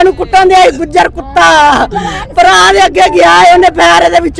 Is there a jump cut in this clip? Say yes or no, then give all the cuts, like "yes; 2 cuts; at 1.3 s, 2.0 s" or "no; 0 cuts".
no; 0 cuts